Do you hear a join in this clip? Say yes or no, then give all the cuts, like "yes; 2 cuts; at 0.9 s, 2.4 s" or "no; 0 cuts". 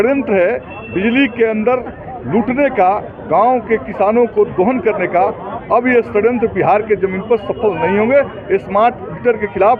no; 0 cuts